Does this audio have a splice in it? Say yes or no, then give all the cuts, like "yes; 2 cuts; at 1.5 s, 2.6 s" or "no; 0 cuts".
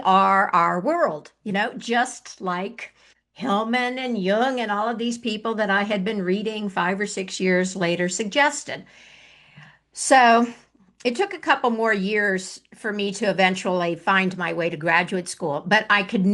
no; 0 cuts